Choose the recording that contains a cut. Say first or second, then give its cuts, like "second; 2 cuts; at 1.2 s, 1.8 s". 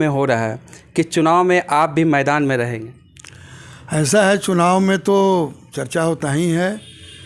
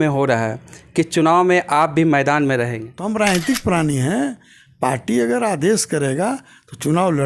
second; 1 cut; at 2.9 s